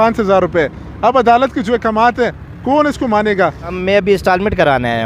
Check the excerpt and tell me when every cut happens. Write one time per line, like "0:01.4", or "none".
0:03.8